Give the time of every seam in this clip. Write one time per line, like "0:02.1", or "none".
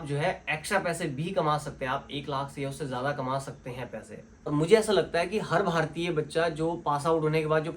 0:04.5